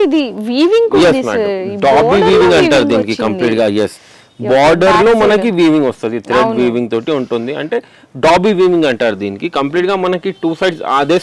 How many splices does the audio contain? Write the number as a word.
zero